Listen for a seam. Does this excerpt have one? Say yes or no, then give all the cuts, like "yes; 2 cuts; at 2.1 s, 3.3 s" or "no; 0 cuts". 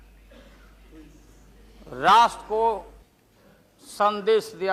no; 0 cuts